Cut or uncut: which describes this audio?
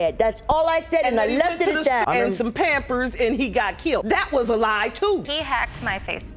cut